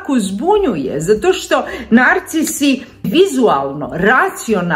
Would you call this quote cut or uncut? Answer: cut